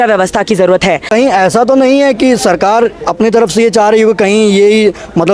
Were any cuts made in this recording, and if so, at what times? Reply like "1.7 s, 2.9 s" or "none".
1.0 s